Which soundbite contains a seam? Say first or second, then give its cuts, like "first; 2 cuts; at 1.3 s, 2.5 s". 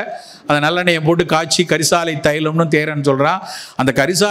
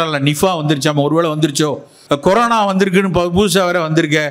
second; 1 cut; at 1.9 s